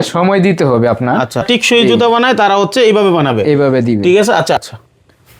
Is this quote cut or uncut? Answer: cut